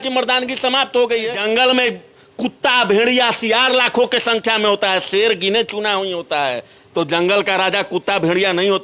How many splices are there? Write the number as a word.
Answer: one